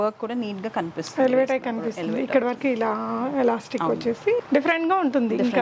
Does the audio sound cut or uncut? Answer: cut